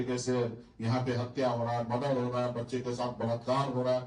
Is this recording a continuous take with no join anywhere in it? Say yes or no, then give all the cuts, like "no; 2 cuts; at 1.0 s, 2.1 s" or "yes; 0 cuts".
yes; 0 cuts